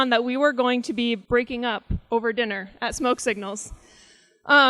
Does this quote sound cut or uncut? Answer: cut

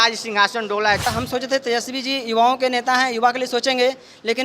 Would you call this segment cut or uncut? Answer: cut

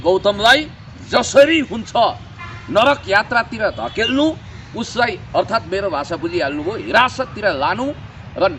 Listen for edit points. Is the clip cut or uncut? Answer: uncut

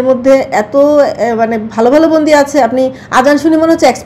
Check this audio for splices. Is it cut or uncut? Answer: uncut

